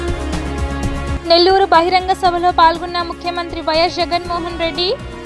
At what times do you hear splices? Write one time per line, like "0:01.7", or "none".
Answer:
0:01.1

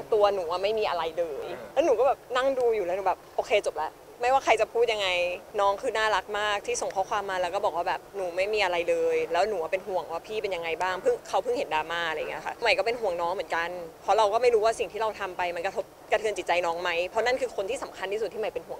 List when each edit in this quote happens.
0:01.6
0:04.0
0:05.4
0:12.6

